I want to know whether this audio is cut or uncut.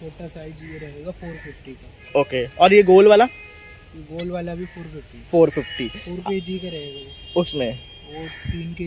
uncut